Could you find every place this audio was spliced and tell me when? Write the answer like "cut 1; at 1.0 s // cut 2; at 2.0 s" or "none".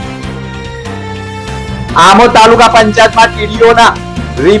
cut 1; at 1.6 s